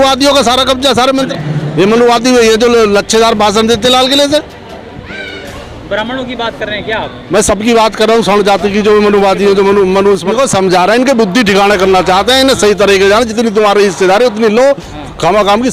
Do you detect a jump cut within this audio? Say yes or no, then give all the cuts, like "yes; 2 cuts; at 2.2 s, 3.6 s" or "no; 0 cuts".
yes; 2 cuts; at 1.3 s, 10.3 s